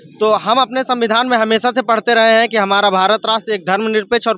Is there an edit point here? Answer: no; 0 cuts

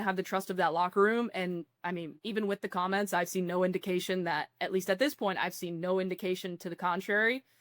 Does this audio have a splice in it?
yes; 1 cut; at 2.2 s

